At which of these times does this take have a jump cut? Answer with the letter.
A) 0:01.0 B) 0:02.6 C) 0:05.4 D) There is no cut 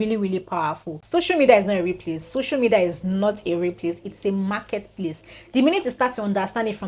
A